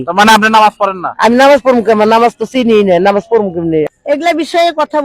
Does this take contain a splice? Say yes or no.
yes